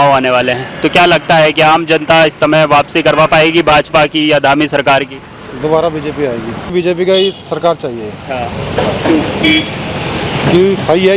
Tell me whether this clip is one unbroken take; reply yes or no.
yes